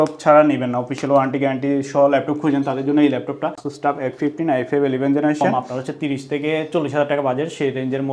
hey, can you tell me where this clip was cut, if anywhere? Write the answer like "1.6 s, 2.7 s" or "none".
3.7 s, 5.5 s